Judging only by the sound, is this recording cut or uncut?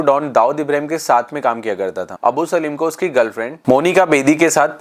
cut